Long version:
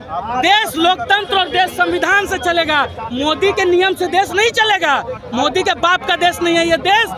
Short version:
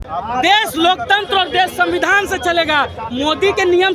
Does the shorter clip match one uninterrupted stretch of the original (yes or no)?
yes